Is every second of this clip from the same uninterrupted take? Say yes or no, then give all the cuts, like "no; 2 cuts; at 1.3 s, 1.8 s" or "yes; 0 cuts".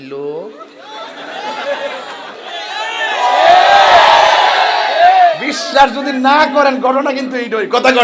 yes; 0 cuts